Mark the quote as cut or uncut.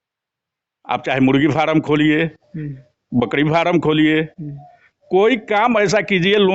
uncut